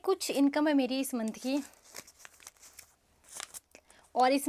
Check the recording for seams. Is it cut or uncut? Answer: uncut